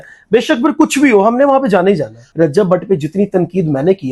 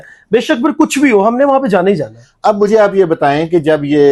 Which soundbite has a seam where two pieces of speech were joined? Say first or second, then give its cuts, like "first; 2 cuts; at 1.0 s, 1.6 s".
first; 1 cut; at 2.2 s